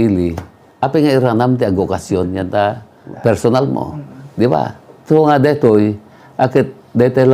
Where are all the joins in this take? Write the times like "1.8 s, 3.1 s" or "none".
3.0 s